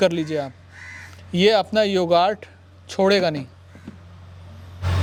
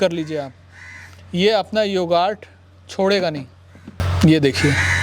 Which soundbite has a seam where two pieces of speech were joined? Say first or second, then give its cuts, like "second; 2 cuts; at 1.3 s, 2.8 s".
second; 1 cut; at 4.0 s